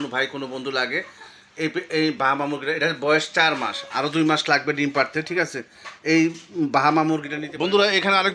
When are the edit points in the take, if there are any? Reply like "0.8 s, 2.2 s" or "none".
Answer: 7.4 s